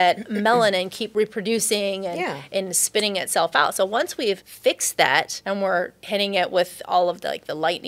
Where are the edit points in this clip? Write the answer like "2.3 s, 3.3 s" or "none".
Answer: 4.5 s, 5.4 s